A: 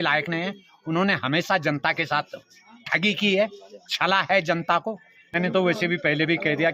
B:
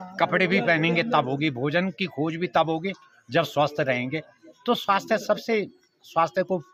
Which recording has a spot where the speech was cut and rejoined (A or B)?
A